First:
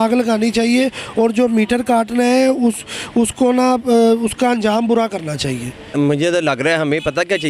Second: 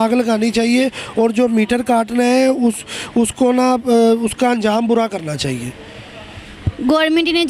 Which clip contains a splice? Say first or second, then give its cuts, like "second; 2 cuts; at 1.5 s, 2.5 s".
first; 1 cut; at 5.9 s